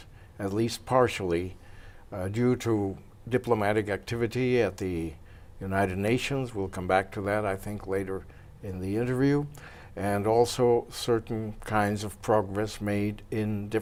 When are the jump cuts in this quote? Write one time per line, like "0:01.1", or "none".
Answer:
none